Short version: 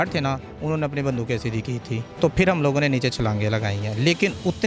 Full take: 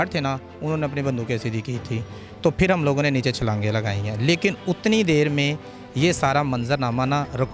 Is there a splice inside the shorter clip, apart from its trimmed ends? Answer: yes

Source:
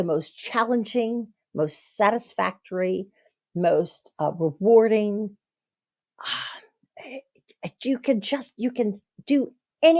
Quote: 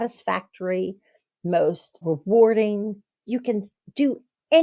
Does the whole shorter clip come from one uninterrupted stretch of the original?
no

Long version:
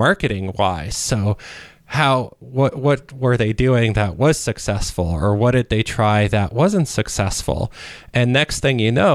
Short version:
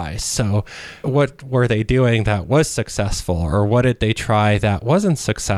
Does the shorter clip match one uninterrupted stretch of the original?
no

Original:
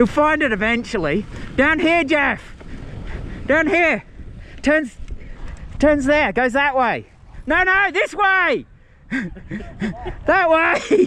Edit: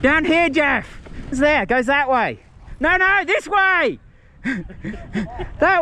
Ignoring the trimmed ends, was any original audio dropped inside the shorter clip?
yes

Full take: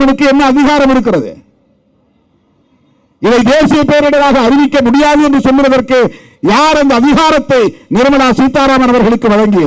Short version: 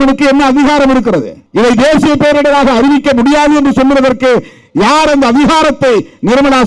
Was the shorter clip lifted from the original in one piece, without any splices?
no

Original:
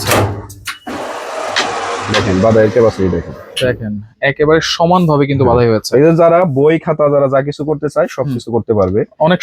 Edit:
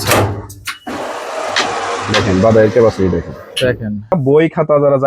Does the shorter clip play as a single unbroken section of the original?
no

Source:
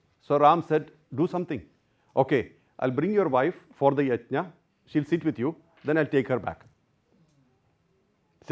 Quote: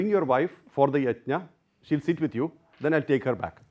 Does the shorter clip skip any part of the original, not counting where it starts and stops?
no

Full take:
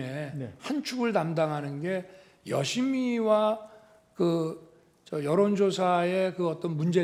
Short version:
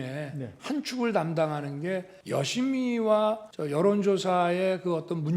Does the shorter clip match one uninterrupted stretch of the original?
no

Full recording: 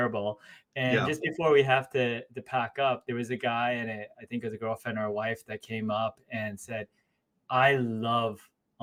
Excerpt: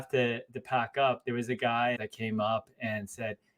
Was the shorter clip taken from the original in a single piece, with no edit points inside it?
no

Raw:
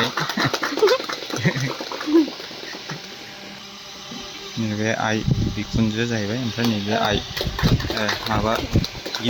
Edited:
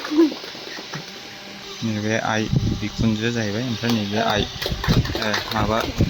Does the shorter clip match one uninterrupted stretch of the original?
no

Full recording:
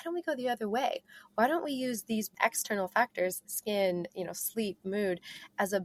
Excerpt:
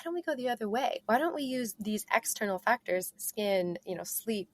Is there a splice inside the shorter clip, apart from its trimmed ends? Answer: yes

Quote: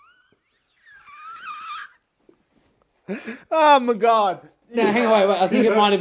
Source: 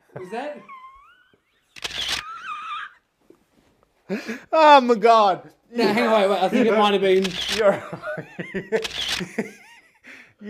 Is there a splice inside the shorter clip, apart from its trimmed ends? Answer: no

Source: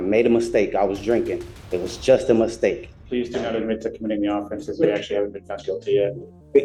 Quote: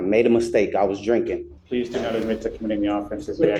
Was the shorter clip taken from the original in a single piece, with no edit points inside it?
no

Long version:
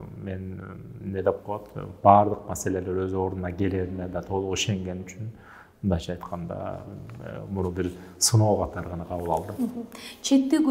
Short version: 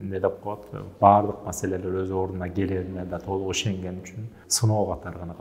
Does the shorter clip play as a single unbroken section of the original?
no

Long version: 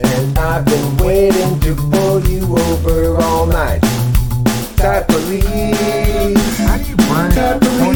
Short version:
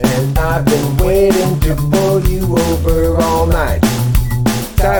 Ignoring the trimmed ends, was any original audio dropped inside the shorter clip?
no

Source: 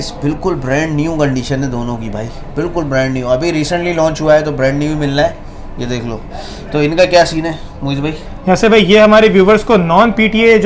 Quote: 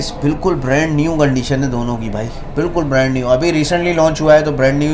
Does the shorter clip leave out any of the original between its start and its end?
no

